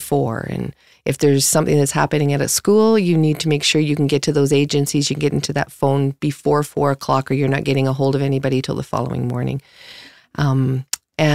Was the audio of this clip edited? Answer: no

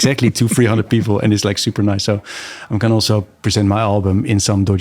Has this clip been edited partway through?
no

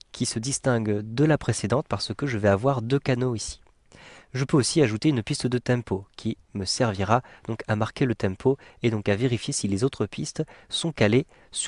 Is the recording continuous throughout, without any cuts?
no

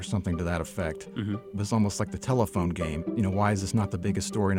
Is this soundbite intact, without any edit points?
no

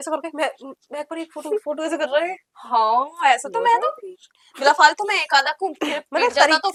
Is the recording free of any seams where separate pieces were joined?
yes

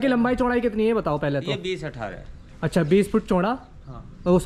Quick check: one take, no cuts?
yes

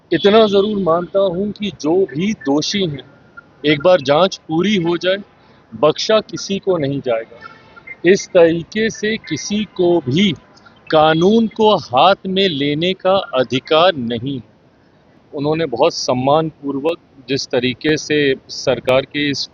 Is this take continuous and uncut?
no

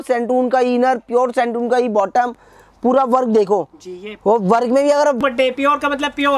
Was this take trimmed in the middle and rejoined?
yes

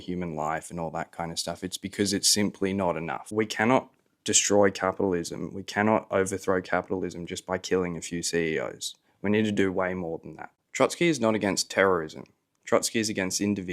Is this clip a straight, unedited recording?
no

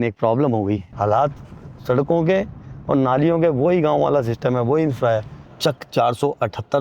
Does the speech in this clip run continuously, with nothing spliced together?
no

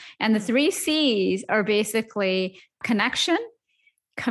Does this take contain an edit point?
yes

